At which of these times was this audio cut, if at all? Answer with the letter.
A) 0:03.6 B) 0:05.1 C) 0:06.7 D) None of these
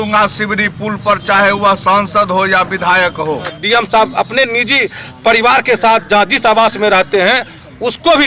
A